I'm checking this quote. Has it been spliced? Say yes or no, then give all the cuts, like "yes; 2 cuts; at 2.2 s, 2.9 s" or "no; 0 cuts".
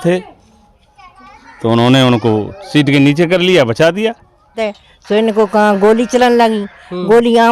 yes; 1 cut; at 4.6 s